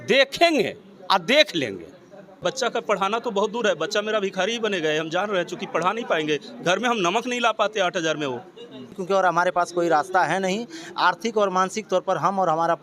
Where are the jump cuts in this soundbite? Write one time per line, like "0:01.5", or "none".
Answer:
0:02.2
0:08.9